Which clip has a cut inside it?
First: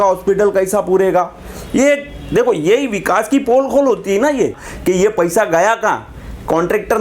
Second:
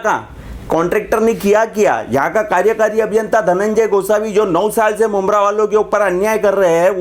first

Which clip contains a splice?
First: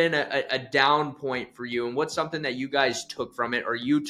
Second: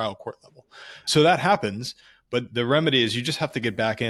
second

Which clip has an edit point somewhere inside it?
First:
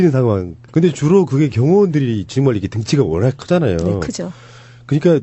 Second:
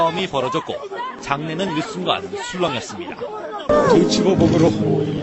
second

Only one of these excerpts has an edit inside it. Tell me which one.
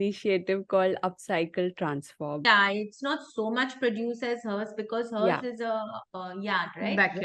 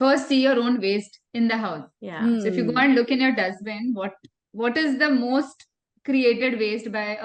first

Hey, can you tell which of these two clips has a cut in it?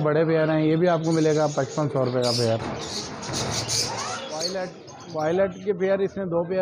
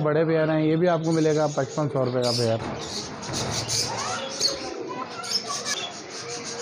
first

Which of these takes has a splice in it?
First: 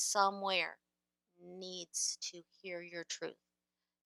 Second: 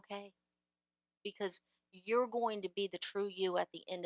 second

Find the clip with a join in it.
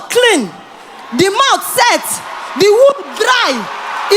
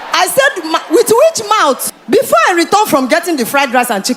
second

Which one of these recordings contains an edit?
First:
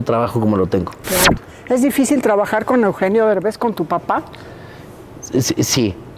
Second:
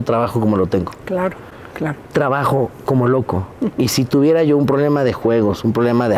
first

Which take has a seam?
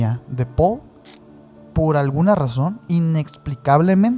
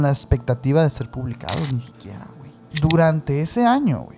second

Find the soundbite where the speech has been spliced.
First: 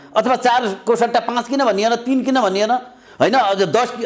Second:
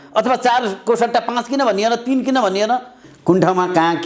second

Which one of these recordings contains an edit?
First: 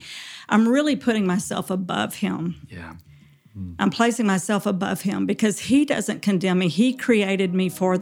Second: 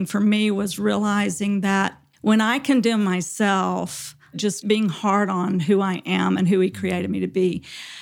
second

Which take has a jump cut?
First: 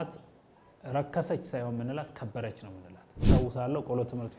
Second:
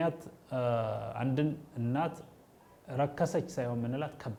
first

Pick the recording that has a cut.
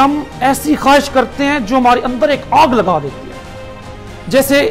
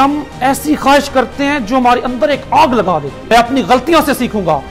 second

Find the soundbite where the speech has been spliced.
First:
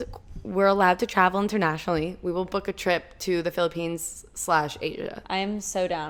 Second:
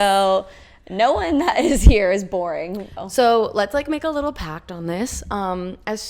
second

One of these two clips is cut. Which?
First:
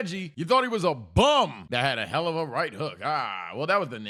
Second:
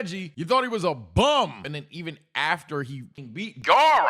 second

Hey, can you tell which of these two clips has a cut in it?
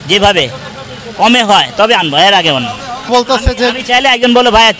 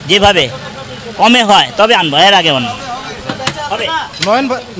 first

